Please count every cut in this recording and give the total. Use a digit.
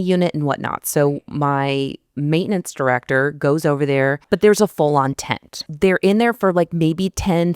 2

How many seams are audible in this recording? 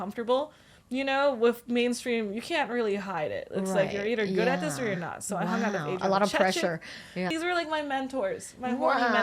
1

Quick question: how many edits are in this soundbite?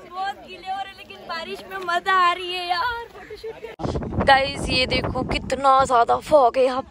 1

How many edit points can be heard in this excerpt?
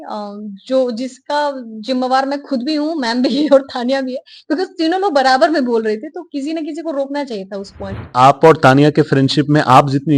1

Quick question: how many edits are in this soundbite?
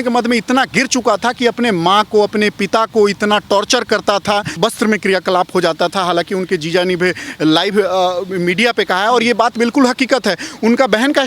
0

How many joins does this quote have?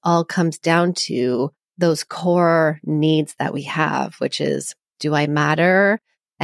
1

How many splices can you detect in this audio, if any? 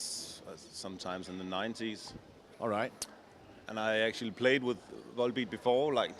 1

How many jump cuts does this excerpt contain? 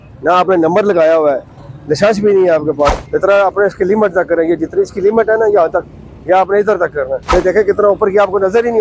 2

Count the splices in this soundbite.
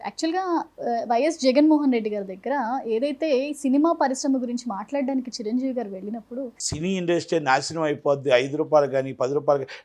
1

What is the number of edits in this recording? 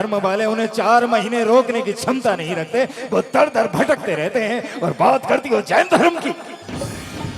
0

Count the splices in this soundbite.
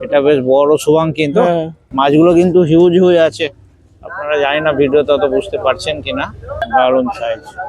2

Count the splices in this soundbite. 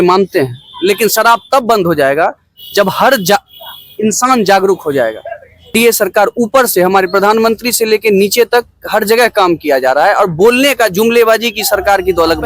1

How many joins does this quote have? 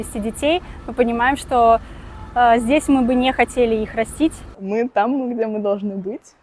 1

